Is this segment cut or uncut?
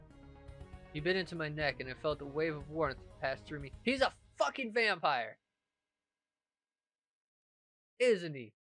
cut